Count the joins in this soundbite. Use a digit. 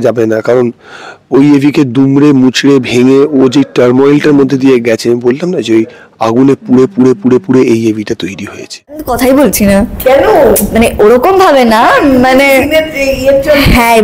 1